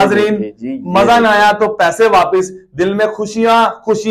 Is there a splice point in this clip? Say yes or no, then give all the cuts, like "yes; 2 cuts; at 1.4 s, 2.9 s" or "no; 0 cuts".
no; 0 cuts